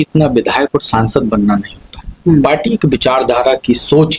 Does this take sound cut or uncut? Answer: uncut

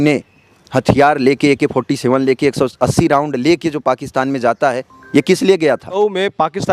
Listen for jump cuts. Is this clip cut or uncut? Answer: cut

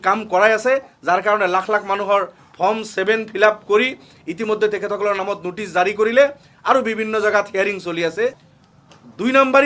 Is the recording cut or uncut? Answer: uncut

